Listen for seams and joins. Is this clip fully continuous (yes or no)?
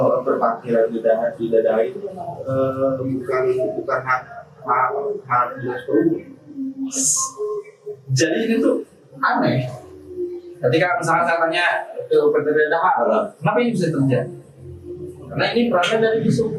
yes